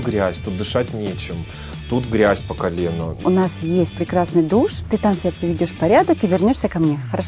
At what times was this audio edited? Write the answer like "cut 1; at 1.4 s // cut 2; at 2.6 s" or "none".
cut 1; at 3.2 s // cut 2; at 4.8 s

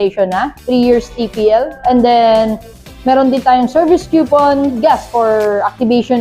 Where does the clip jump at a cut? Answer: cut 1; at 4.8 s

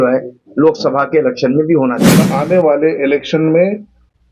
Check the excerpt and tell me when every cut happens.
cut 1; at 2.3 s

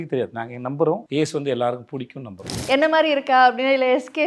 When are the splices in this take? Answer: cut 1; at 1.0 s // cut 2; at 2.5 s

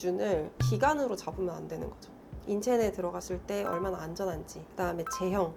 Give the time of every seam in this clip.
none

